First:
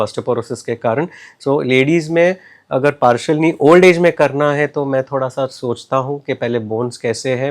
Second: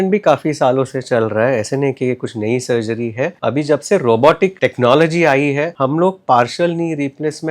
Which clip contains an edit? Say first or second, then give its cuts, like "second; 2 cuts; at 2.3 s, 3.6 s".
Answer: second; 3 cuts; at 3.4 s, 4.5 s, 5.7 s